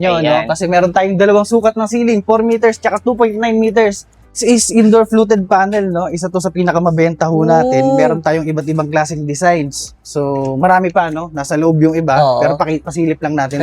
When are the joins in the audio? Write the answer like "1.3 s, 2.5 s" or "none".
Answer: 4.4 s